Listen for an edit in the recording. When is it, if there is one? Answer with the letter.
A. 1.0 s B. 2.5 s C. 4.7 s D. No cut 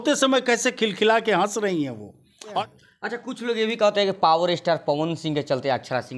B